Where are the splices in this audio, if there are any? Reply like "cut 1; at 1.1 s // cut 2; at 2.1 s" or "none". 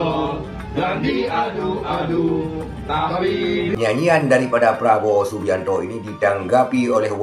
cut 1; at 3.7 s

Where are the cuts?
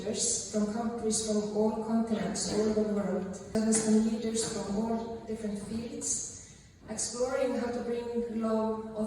cut 1; at 3.5 s

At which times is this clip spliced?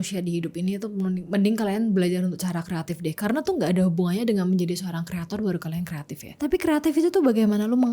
cut 1; at 6.3 s

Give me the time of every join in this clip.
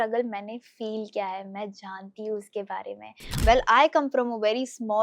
cut 1; at 3.3 s

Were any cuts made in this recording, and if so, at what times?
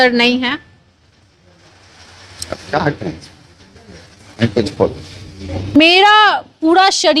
cut 1; at 5.8 s

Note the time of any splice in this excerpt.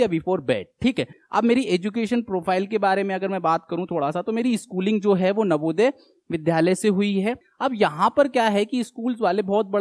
cut 1; at 1.2 s // cut 2; at 7.4 s

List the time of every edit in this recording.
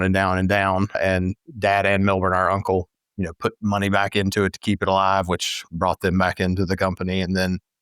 cut 1; at 1.0 s

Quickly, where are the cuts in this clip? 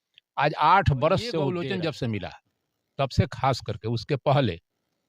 cut 1; at 1.5 s

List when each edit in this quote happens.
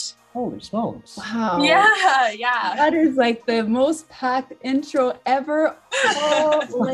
none

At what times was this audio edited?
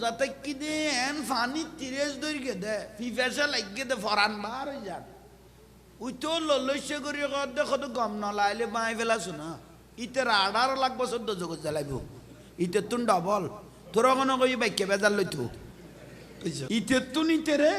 cut 1; at 16.6 s

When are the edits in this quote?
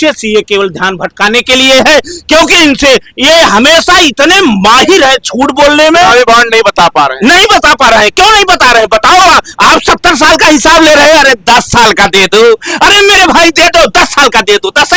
none

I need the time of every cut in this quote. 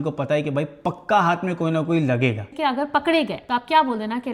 cut 1; at 2.5 s

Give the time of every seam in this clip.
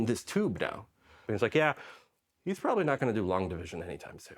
cut 1; at 1.2 s

